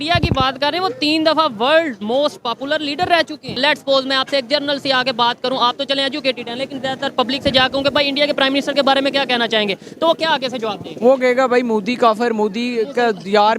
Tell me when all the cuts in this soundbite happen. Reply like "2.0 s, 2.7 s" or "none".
3.6 s